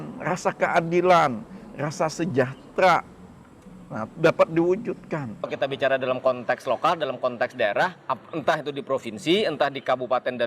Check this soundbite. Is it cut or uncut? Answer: cut